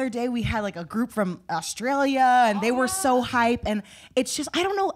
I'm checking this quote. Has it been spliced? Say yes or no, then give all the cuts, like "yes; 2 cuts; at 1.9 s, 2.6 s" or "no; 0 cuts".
no; 0 cuts